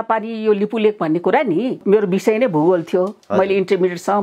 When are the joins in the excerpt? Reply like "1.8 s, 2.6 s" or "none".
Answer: 1.8 s

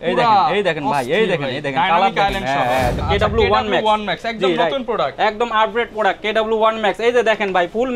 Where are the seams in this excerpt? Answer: 3.0 s

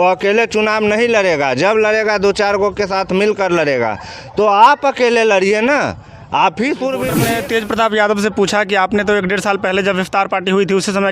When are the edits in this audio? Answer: 7.2 s

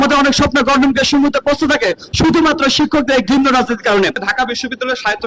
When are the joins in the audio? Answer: 4.2 s

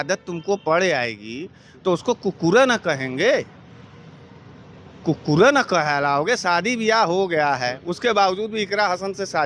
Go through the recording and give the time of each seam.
none

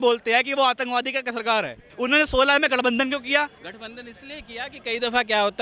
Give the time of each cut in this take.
1.8 s

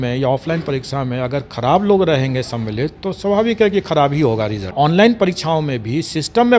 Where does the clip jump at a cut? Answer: 4.7 s

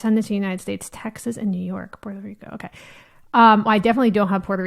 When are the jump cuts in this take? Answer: none

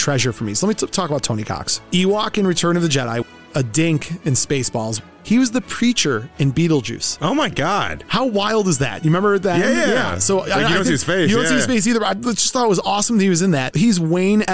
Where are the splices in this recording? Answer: 3.2 s, 5.0 s

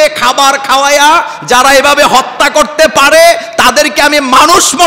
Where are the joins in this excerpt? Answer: none

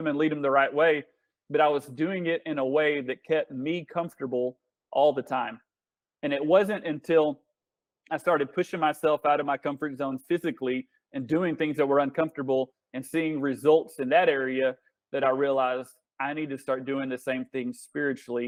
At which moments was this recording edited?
none

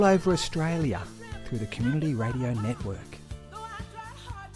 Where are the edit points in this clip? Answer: 2.9 s

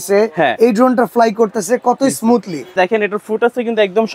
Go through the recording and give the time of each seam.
2.7 s

